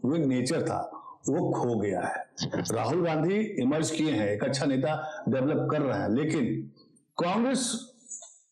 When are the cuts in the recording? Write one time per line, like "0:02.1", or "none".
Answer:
none